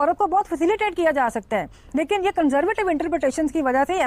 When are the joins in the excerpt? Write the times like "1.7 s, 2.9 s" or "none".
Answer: none

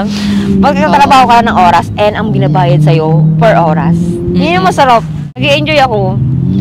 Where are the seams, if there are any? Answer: 5.3 s

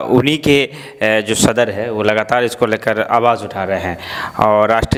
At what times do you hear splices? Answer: none

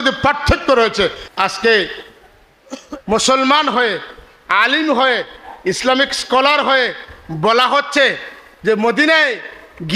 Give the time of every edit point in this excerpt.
1.2 s

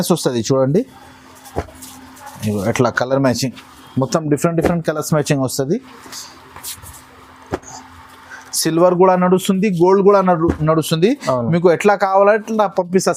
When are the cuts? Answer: none

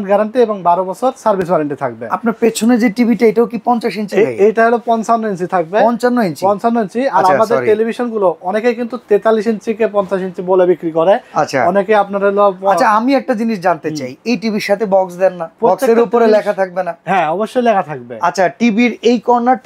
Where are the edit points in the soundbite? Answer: none

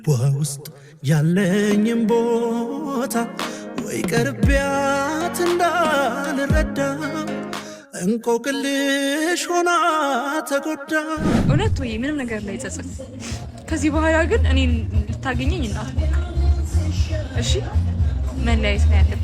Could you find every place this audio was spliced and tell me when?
11.4 s

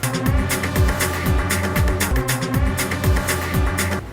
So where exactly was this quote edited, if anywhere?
none

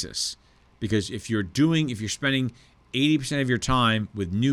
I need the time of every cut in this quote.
none

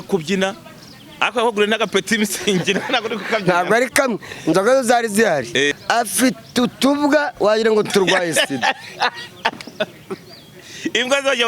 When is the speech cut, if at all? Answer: 5.7 s

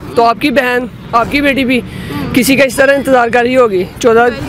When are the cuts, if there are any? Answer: none

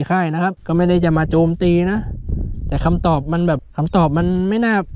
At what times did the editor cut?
3.7 s

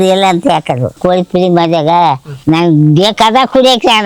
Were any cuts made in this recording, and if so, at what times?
1.0 s, 2.3 s

